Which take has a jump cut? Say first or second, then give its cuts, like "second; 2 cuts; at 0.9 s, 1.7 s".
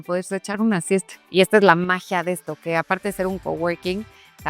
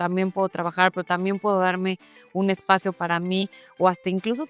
first; 1 cut; at 1.2 s